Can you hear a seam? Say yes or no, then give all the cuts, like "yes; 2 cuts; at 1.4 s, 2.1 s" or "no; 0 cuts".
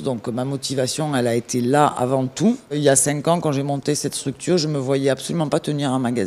no; 0 cuts